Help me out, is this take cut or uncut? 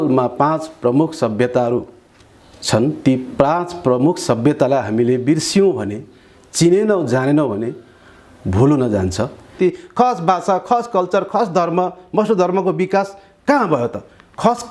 cut